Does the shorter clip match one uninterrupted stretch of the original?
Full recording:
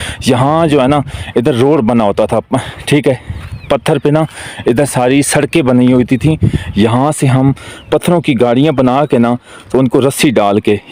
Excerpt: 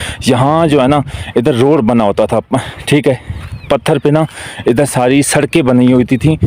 yes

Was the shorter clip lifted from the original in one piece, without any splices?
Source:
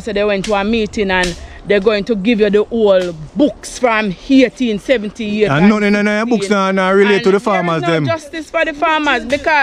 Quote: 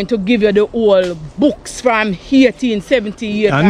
yes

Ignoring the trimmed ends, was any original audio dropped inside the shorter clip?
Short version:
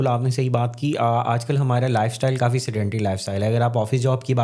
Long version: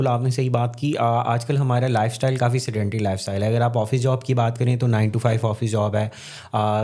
no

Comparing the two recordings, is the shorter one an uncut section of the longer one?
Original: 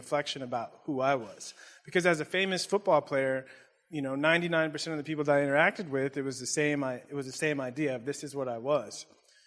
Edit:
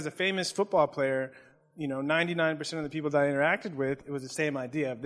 no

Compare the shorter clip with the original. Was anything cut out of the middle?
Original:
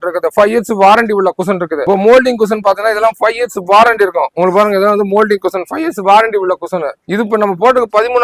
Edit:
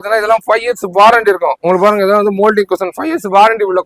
no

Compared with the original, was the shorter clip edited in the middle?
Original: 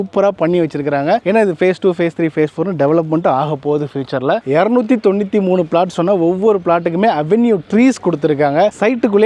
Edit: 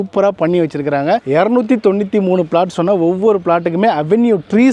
yes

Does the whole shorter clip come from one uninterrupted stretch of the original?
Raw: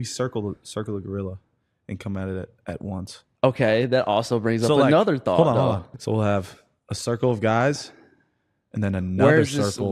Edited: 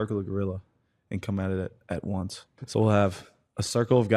no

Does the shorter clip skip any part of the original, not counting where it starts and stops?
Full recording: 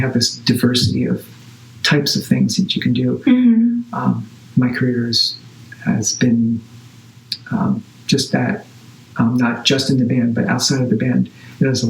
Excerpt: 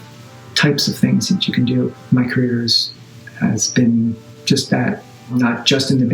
yes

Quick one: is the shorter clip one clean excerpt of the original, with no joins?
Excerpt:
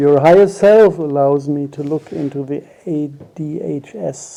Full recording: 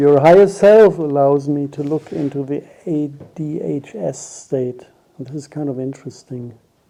yes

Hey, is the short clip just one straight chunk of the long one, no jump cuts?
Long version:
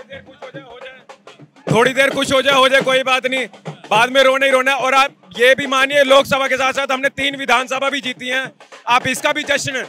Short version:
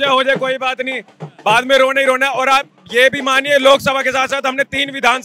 yes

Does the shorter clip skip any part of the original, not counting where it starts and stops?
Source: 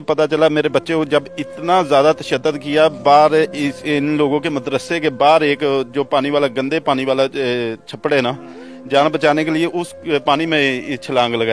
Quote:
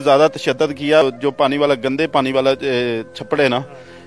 yes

